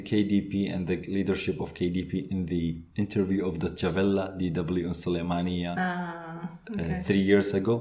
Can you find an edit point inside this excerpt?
no; 0 cuts

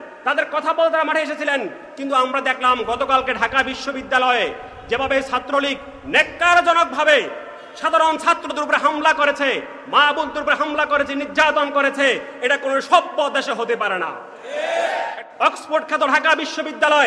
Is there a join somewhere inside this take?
yes; 1 cut; at 15.2 s

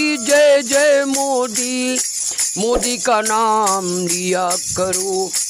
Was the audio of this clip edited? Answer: no; 0 cuts

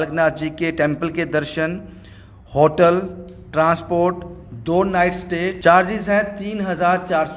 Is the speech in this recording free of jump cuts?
no; 1 cut; at 5.6 s

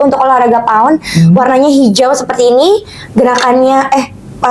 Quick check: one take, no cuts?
yes; 0 cuts

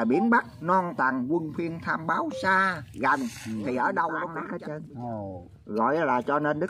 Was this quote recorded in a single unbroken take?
no; 1 cut; at 4.4 s

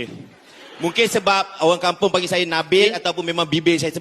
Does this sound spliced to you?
yes; 1 cut; at 2.9 s

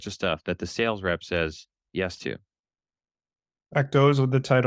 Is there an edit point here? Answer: no; 0 cuts

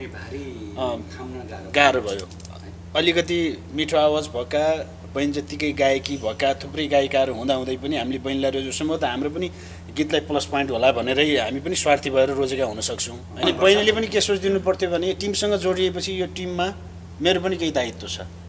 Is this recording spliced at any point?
yes; 1 cut; at 13.4 s

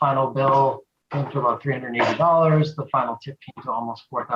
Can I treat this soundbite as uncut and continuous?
yes; 0 cuts

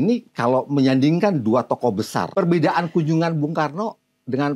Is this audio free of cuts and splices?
no; 1 cut; at 2.3 s

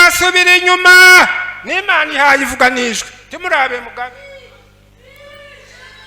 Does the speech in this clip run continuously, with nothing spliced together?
yes; 0 cuts

